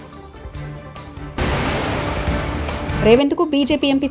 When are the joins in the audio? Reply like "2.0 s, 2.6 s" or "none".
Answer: 1.3 s, 2.9 s